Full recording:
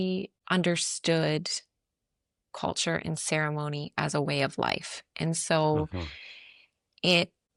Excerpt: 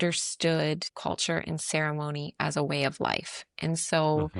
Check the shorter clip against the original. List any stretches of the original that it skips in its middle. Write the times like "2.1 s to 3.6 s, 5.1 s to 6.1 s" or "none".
1.5 s to 2.5 s

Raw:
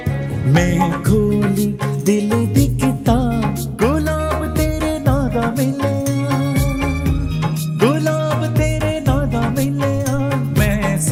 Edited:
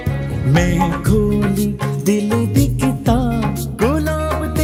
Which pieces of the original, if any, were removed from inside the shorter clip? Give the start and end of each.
none

